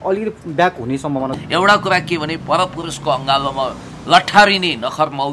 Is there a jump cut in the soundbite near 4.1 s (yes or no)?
no